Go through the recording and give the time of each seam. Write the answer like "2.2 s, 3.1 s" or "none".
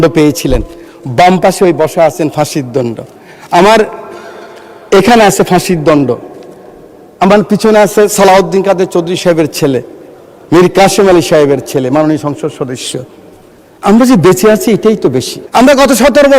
15.3 s